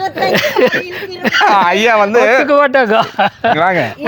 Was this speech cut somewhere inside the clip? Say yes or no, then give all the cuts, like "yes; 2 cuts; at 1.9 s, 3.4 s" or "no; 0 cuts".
no; 0 cuts